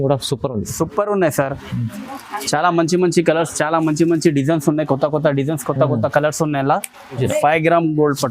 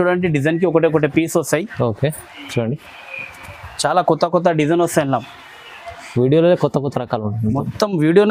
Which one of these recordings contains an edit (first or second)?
first